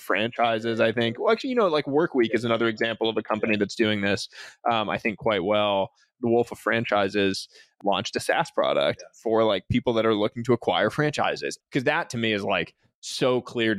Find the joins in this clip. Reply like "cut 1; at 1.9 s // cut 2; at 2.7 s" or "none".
cut 1; at 6.1 s // cut 2; at 7.7 s // cut 3; at 11.5 s